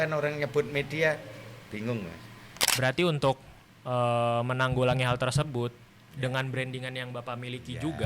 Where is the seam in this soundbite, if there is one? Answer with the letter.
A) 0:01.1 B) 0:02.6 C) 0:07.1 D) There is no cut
B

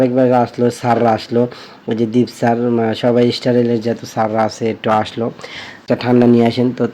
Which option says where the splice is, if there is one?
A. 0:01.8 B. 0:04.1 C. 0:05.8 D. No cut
C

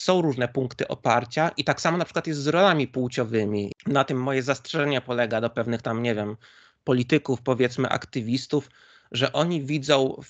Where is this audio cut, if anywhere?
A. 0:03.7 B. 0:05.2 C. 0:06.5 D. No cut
A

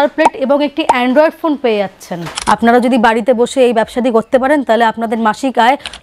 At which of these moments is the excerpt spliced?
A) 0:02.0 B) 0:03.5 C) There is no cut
A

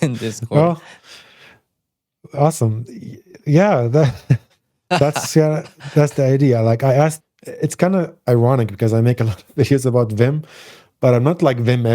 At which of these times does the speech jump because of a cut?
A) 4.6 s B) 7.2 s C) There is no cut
B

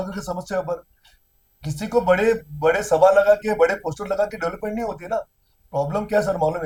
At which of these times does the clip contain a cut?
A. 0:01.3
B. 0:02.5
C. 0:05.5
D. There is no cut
D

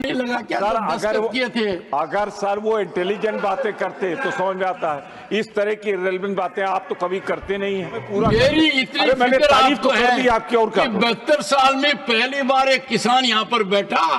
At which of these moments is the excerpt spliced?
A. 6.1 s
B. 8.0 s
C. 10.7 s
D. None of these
B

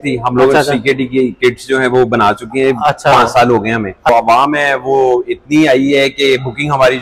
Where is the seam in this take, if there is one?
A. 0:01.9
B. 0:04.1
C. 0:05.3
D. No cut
B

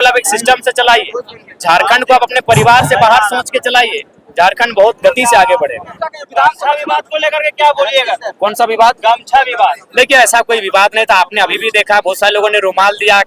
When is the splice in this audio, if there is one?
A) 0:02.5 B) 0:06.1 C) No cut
B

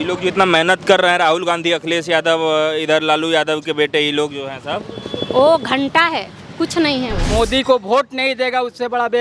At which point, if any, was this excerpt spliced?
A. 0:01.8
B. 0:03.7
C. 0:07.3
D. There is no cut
C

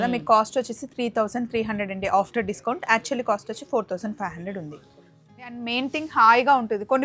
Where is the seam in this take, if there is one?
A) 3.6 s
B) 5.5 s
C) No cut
B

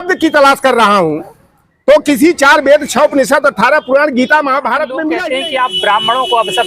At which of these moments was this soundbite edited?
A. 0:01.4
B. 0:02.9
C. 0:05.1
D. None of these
C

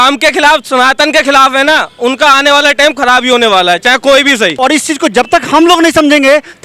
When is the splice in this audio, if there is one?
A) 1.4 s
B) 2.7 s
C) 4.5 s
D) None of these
C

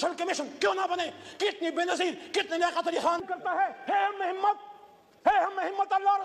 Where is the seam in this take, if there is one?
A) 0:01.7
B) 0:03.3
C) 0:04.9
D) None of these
B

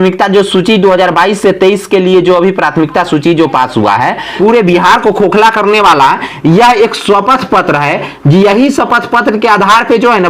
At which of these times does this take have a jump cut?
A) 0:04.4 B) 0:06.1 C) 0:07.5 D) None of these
A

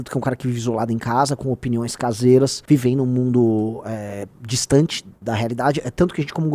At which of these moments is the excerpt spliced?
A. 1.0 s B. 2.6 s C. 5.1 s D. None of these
B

